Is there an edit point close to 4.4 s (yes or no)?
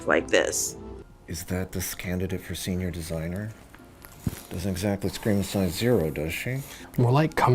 no